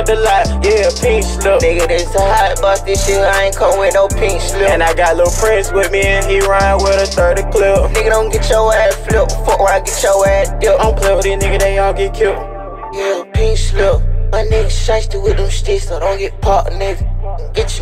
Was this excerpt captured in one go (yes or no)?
yes